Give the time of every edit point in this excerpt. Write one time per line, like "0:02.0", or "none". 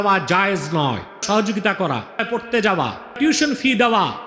0:01.2
0:02.2
0:03.2